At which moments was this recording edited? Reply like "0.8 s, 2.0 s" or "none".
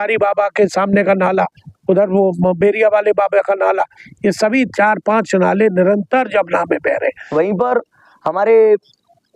7.2 s